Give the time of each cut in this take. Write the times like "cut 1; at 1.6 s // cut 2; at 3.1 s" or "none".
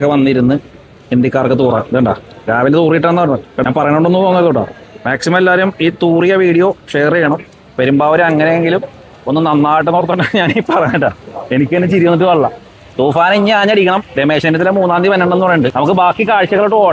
cut 1; at 3.5 s // cut 2; at 15.7 s